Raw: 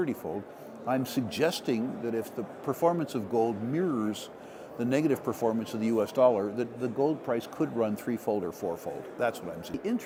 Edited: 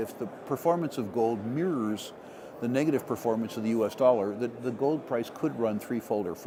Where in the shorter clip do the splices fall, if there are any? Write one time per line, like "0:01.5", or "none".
none